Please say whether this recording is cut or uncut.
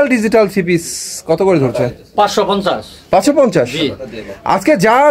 uncut